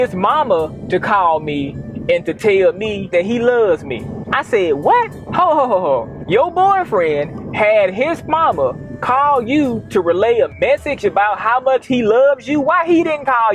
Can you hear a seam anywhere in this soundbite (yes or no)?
no